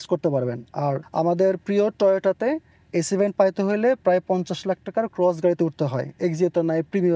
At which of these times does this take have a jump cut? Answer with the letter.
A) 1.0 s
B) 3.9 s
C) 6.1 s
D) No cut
A